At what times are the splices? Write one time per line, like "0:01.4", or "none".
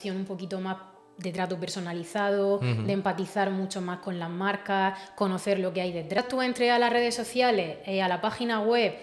0:06.2